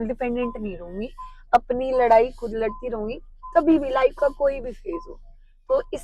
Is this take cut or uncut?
uncut